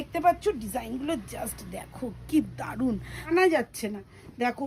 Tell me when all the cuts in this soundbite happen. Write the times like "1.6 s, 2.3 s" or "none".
3.2 s